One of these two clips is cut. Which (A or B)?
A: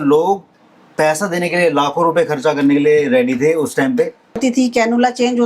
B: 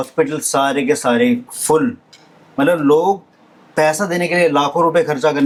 A